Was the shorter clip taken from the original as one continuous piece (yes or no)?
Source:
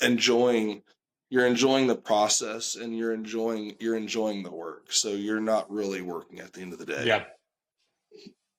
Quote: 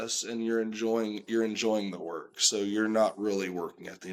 yes